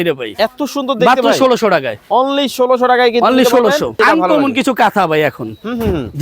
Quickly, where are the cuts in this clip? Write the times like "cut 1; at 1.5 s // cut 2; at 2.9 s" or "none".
cut 1; at 4.0 s